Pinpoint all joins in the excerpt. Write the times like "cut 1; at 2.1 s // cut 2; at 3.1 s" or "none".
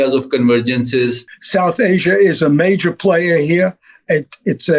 cut 1; at 1.4 s